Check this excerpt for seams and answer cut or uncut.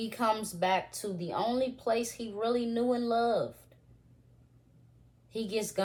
uncut